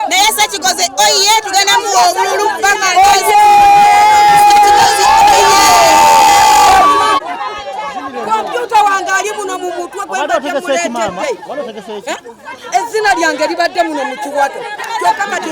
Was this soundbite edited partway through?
yes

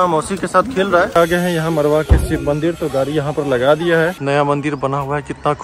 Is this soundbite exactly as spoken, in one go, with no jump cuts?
no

